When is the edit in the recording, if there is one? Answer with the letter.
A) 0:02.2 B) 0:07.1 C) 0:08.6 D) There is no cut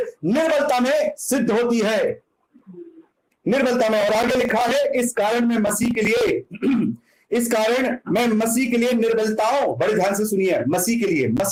D